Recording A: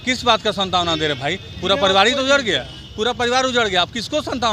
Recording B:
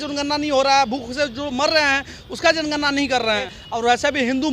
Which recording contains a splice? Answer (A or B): B